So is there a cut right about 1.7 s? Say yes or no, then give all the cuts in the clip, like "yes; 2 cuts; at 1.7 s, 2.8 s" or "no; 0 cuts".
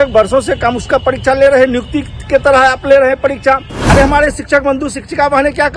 no; 1 cut; at 3.9 s